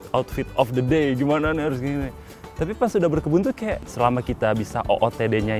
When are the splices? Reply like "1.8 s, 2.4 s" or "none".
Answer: 3.9 s